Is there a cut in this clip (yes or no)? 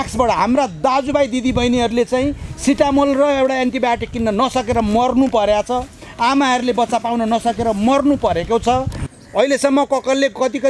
yes